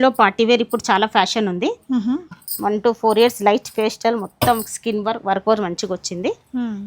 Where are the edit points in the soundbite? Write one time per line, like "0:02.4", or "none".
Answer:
0:02.3